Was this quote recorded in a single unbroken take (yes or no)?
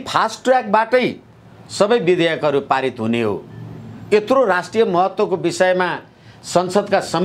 yes